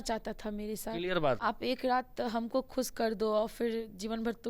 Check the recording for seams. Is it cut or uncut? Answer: cut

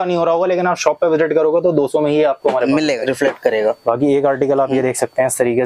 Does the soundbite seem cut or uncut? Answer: cut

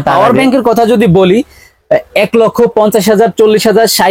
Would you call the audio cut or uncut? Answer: uncut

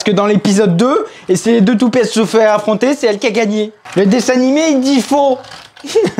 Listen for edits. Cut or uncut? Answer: uncut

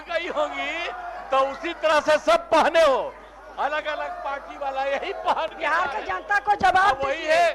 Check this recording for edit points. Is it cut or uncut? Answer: uncut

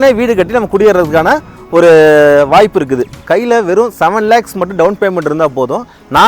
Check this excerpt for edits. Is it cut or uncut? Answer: cut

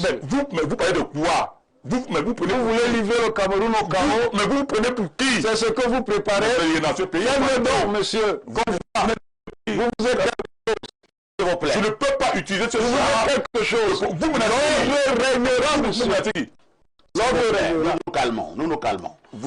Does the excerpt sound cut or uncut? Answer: uncut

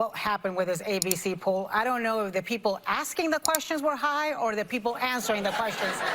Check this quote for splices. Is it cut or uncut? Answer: uncut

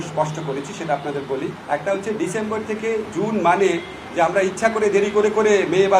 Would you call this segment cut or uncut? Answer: cut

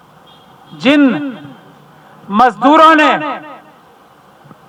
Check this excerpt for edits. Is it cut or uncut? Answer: uncut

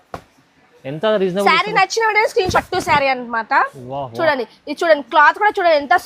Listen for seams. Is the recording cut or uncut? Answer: cut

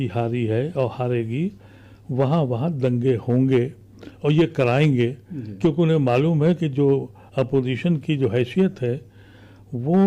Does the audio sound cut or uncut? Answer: uncut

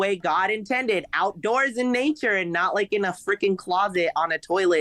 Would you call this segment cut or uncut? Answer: uncut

